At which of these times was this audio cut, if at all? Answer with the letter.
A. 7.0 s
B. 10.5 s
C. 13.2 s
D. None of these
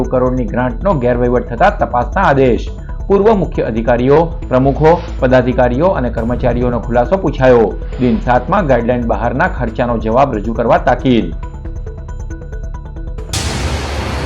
C